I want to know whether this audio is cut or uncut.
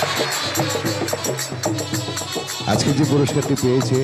uncut